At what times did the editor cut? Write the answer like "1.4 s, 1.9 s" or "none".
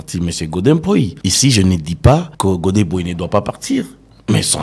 1.2 s, 2.3 s